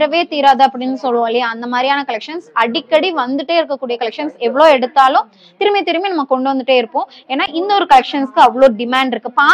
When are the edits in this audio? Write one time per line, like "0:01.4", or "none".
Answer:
none